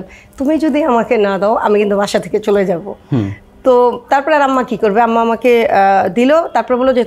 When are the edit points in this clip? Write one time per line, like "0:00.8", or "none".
none